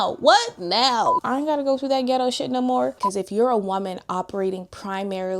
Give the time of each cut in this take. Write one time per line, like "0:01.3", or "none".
0:01.2
0:03.0